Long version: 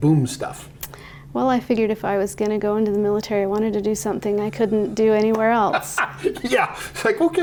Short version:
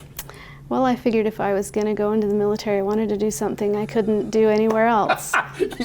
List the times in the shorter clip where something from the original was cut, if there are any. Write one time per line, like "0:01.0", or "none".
none

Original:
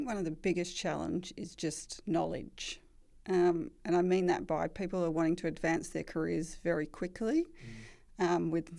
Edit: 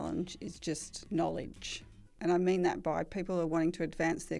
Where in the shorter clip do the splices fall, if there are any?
0:02.1

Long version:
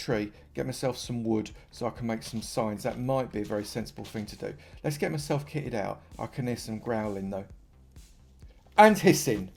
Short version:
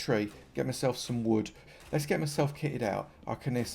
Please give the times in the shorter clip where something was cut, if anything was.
0:01.7

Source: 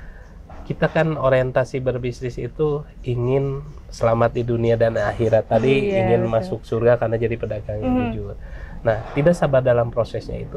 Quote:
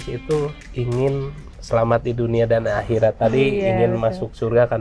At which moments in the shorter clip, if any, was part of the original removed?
none

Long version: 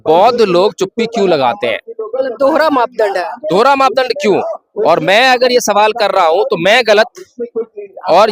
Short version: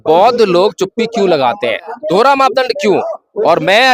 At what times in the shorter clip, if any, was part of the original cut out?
0:01.9

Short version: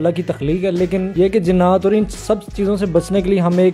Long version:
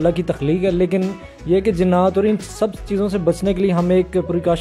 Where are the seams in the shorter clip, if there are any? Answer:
0:01.1

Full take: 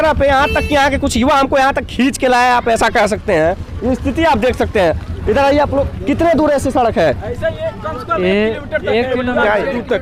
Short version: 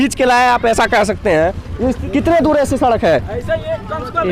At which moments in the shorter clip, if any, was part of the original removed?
0:02.0

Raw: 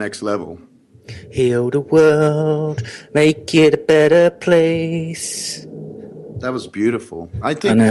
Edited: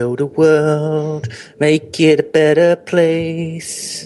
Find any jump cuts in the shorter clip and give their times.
none

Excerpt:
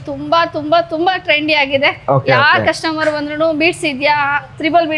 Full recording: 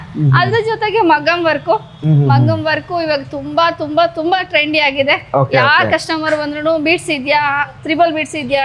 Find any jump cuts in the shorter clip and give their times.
none

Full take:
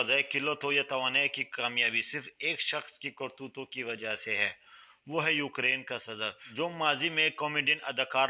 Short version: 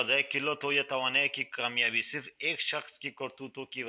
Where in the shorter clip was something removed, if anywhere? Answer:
none

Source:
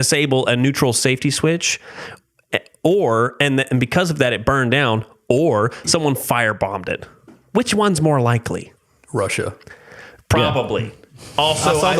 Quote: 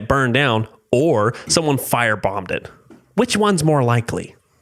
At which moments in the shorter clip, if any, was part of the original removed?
none

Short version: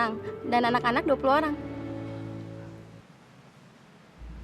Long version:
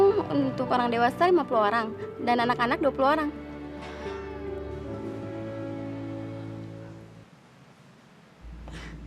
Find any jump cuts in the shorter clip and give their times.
0:01.7

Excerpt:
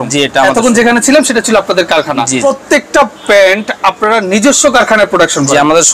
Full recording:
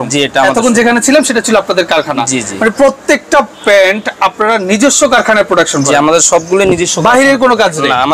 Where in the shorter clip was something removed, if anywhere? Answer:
0:02.4

